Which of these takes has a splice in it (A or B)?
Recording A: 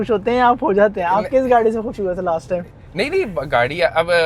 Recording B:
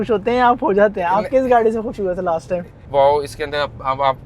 B